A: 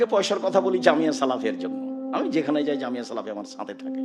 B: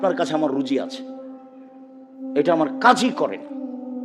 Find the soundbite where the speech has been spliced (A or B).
B